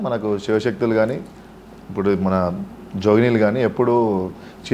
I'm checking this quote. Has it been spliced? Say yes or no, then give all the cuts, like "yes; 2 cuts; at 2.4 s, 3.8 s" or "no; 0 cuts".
no; 0 cuts